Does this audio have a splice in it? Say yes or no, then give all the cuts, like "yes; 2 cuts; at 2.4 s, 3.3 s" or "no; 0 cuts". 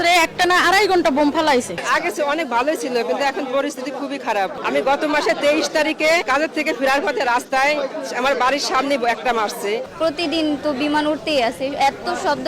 yes; 3 cuts; at 1.8 s, 4.6 s, 9.9 s